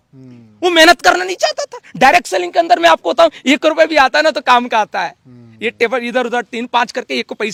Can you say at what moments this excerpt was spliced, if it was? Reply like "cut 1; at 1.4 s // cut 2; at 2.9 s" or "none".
none